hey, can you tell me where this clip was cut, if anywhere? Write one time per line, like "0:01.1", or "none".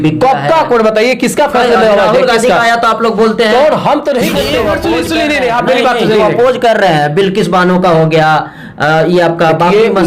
0:04.4